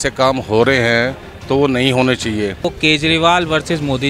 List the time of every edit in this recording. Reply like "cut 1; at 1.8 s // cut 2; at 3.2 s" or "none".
cut 1; at 2.7 s